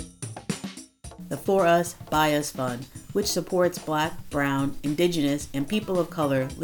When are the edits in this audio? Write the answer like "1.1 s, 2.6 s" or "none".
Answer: 1.0 s